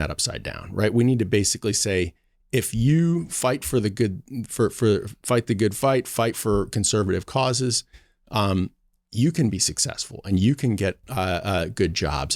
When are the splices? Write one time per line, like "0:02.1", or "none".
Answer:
none